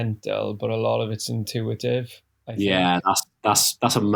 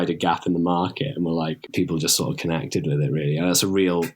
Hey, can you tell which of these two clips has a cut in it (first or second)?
second